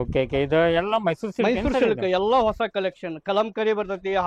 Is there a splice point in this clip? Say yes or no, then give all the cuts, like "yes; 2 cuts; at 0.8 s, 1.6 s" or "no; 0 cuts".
no; 0 cuts